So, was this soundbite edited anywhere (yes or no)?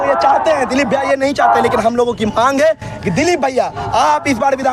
no